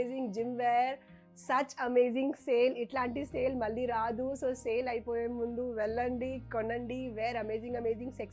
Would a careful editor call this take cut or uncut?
uncut